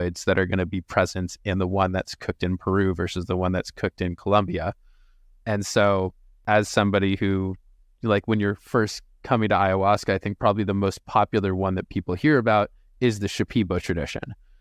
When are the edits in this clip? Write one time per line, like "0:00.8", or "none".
0:06.3

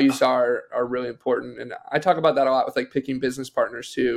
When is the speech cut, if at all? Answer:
none

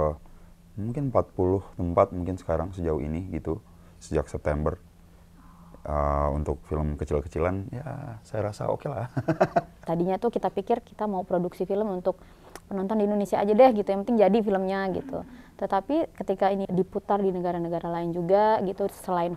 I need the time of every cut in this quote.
0:09.7
0:16.6

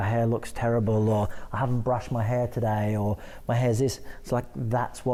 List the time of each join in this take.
none

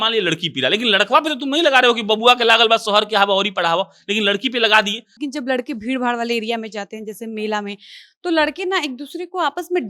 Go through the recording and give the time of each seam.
0:05.2

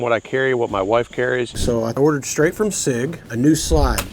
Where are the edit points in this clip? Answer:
0:01.5
0:03.2

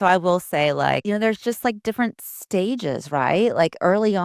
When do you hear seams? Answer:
0:01.0

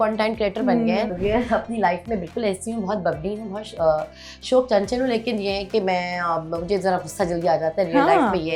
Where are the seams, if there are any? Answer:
0:01.1

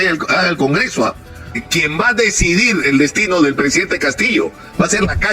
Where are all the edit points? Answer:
0:01.6

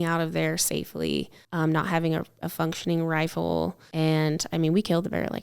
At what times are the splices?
0:01.4
0:03.8

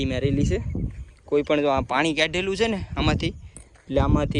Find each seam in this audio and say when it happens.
none

